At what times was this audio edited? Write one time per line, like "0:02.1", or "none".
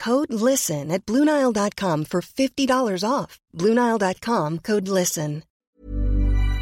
0:05.7